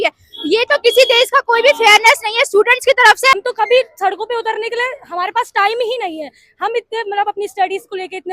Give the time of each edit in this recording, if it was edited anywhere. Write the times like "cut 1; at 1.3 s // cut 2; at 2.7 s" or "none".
cut 1; at 3.4 s